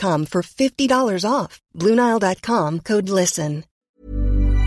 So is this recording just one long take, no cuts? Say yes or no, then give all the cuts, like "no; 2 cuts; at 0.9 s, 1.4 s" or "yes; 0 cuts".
no; 1 cut; at 3.7 s